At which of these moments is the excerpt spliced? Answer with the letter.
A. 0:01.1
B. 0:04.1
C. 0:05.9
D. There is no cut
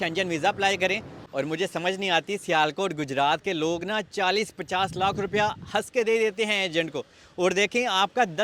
A